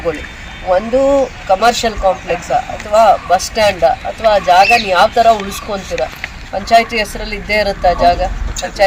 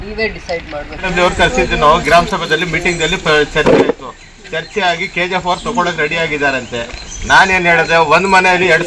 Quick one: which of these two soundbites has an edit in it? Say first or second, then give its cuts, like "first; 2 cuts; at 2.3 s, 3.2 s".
second; 1 cut; at 1.1 s